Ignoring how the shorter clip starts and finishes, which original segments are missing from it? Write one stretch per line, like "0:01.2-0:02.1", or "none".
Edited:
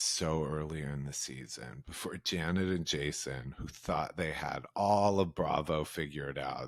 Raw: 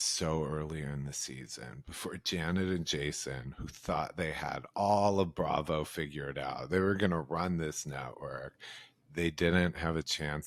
none